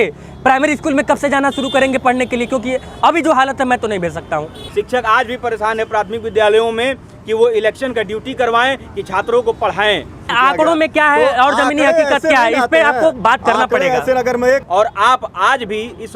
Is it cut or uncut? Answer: cut